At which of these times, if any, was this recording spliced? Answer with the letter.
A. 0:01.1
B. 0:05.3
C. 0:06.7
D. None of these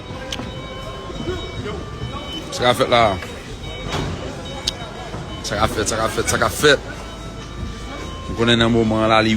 A